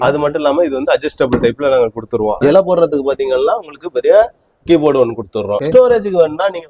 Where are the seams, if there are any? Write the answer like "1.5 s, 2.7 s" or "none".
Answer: 2.4 s, 5.6 s